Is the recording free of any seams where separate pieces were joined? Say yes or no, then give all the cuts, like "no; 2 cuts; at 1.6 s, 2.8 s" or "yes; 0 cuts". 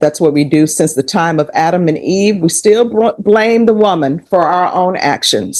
yes; 0 cuts